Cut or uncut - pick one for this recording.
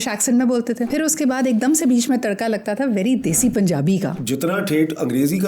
cut